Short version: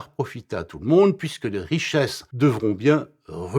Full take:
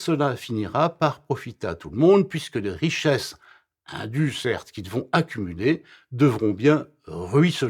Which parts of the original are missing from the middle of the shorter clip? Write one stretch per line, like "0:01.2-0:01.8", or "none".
0:03.3-0:06.0